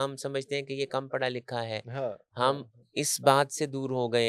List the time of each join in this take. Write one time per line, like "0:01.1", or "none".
none